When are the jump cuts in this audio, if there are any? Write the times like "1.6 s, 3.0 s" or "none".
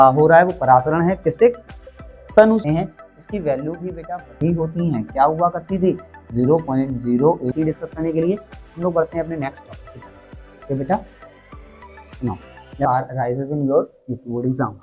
2.6 s, 7.5 s, 12.8 s